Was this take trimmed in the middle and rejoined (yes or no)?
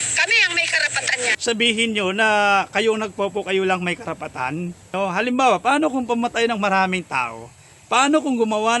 yes